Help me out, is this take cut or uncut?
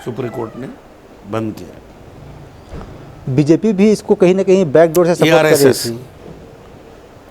uncut